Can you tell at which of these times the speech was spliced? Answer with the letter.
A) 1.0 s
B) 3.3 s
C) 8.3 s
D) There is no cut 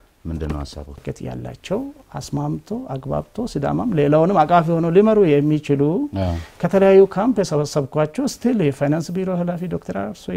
A